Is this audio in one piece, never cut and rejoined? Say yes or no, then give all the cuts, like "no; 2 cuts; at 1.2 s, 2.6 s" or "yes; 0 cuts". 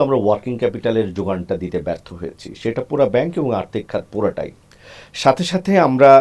yes; 0 cuts